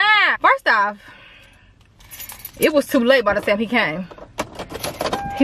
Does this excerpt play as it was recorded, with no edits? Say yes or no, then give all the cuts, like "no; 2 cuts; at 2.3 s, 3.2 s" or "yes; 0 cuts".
yes; 0 cuts